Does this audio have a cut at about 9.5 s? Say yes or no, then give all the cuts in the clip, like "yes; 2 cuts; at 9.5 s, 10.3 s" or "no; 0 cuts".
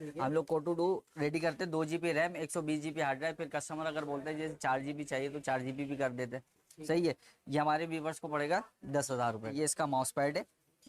yes; 1 cut; at 9.5 s